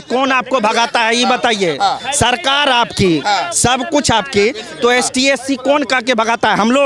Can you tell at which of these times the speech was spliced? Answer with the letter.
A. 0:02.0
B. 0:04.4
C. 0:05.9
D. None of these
D